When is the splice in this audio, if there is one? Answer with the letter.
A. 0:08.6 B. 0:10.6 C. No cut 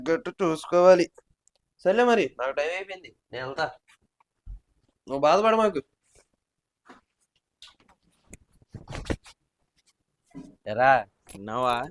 B